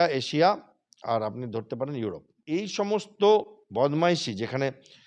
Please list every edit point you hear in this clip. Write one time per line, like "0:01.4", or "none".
0:02.3